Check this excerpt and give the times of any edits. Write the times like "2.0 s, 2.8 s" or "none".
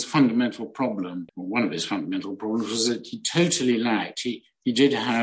1.3 s